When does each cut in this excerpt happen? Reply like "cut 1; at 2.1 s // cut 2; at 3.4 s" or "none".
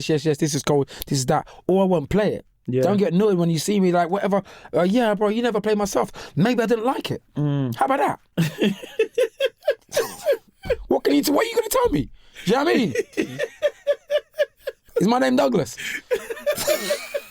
cut 1; at 8.3 s // cut 2; at 13.1 s // cut 3; at 14.8 s